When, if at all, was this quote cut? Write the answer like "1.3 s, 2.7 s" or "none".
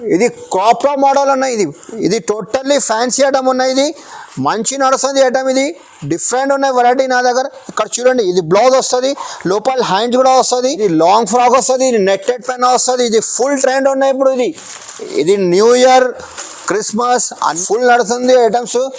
10.8 s, 17.6 s